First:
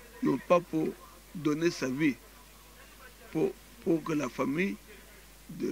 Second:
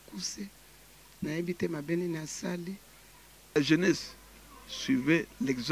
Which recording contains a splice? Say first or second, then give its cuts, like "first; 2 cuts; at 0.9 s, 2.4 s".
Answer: second; 1 cut; at 3.6 s